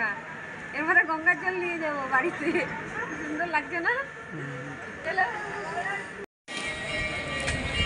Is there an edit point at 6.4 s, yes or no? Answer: no